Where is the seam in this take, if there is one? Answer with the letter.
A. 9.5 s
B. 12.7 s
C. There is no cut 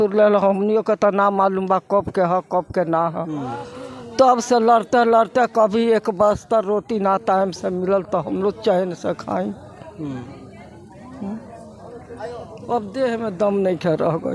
C